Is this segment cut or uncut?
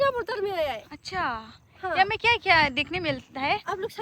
uncut